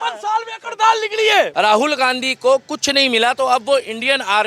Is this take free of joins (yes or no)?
no